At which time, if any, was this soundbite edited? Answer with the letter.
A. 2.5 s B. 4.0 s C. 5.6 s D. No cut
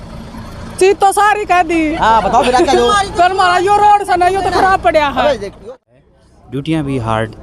C